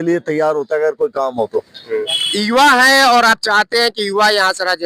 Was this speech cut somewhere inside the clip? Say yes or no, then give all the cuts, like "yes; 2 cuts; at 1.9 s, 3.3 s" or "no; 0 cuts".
yes; 1 cut; at 2.2 s